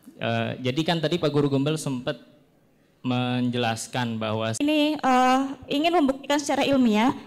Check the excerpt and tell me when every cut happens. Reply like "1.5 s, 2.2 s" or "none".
4.6 s